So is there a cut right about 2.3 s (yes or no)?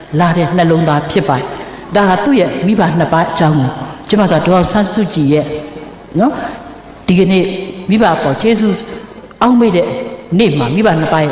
no